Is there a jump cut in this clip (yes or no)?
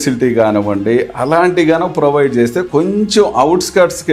no